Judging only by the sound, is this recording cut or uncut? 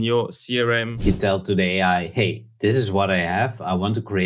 cut